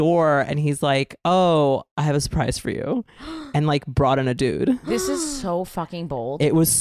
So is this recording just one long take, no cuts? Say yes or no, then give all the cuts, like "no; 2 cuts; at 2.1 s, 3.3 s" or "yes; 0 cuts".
yes; 0 cuts